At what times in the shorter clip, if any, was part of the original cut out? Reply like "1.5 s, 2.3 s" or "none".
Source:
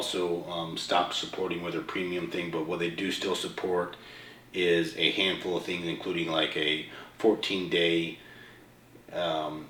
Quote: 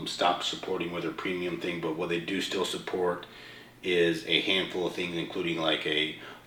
none